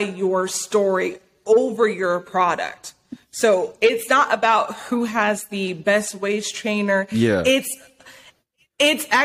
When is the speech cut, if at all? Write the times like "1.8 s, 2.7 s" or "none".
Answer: none